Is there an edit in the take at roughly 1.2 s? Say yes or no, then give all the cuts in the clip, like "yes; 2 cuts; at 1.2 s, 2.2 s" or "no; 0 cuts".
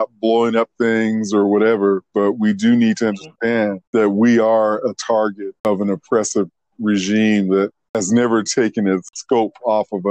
no; 4 cuts; at 3.8 s, 5.7 s, 7.9 s, 9.1 s